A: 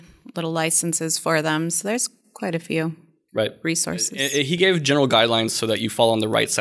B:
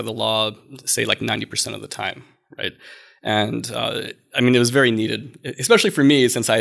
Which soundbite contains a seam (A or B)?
A